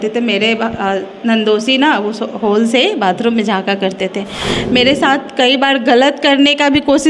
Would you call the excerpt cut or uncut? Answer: uncut